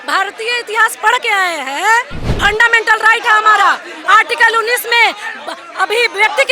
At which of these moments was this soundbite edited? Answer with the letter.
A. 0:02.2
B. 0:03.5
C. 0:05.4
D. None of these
A